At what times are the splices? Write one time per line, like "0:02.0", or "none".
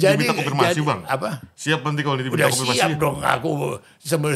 none